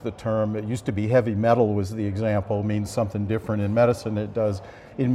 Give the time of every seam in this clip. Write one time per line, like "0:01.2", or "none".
none